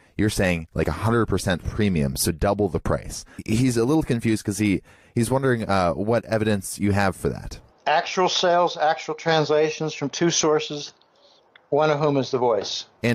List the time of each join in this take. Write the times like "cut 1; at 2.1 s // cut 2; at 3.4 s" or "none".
cut 1; at 9.5 s